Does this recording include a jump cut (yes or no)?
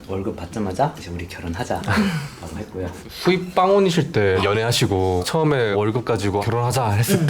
yes